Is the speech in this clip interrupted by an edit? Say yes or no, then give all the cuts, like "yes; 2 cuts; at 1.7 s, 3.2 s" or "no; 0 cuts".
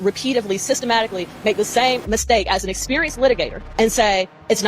yes; 1 cut; at 3.6 s